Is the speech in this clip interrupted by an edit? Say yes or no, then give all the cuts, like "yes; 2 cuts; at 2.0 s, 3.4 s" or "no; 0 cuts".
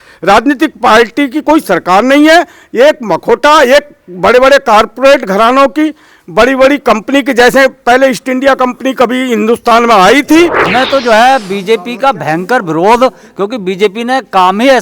yes; 1 cut; at 10.7 s